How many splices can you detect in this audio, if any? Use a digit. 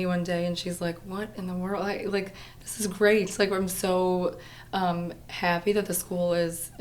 0